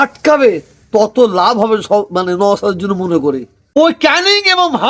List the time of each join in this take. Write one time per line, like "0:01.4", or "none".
0:03.6